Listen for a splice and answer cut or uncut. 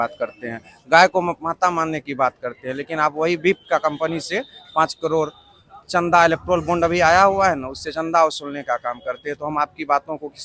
uncut